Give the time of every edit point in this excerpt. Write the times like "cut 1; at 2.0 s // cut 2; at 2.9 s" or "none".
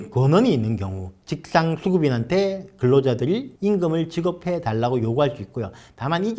cut 1; at 1.2 s

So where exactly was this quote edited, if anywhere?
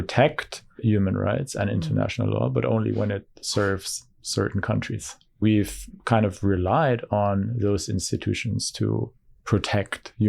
cut 1; at 0.8 s // cut 2; at 5.3 s

